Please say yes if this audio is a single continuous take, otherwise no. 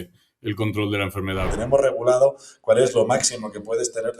no